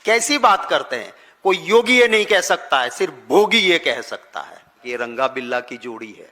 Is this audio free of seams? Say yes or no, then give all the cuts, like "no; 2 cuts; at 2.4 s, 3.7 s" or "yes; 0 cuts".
no; 1 cut; at 4.7 s